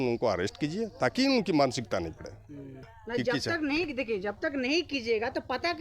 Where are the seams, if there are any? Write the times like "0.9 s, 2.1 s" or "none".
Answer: 3.0 s